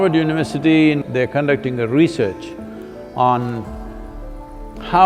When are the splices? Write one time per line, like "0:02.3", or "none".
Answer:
0:01.0